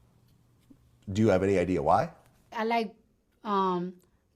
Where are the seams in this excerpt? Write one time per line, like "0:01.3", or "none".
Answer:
0:02.5